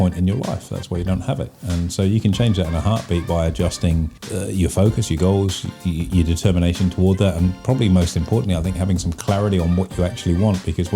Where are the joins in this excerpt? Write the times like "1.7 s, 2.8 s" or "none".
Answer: 4.2 s